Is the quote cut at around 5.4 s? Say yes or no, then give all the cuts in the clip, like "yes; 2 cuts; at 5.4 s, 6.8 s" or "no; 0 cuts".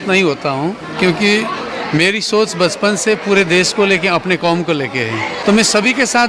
yes; 1 cut; at 5.4 s